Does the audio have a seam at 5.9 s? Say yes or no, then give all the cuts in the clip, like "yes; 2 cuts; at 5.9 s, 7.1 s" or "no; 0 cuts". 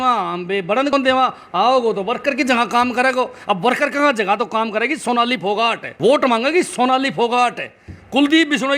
yes; 2 cuts; at 0.9 s, 5.9 s